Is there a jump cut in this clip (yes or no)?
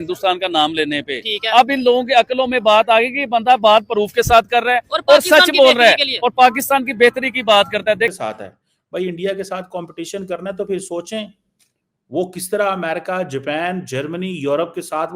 yes